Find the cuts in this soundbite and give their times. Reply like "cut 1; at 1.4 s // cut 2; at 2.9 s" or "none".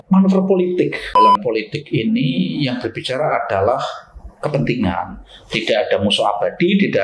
cut 1; at 1.1 s